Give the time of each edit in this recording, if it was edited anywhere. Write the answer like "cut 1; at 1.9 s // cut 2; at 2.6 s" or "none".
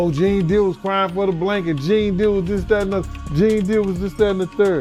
none